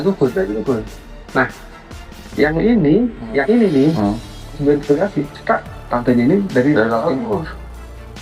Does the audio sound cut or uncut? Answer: cut